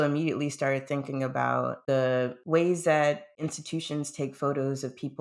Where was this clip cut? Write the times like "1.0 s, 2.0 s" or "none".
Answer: none